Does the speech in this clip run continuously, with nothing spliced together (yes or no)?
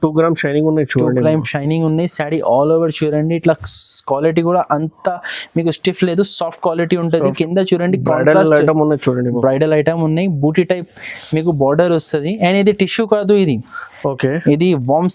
yes